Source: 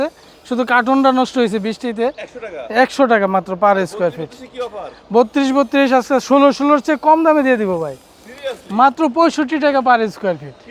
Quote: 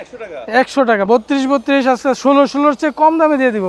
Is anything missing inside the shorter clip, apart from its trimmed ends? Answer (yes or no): yes